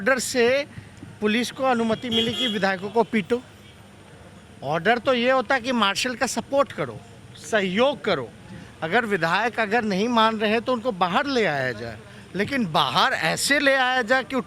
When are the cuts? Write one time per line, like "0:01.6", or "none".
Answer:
none